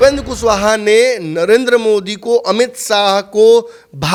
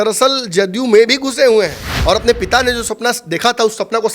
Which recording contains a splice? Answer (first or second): second